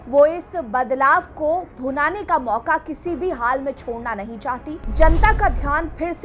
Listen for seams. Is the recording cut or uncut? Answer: uncut